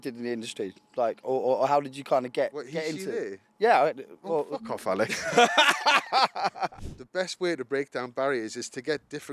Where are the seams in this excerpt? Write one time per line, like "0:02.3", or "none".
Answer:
0:06.7